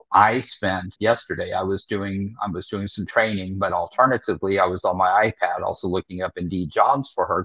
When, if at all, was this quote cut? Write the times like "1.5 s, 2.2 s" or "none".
0.9 s